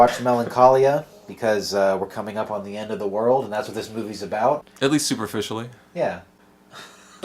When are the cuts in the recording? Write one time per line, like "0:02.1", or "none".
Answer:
0:02.2